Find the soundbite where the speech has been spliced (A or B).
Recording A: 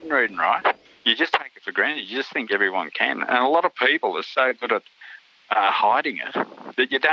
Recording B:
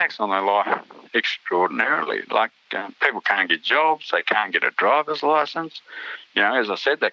A